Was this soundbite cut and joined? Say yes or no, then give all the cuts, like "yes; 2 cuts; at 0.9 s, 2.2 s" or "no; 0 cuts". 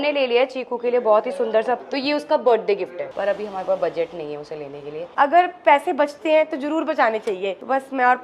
yes; 3 cuts; at 1.8 s, 3.0 s, 5.1 s